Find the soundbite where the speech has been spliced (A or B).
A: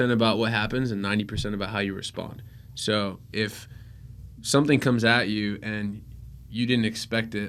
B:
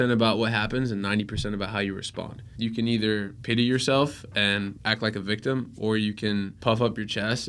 B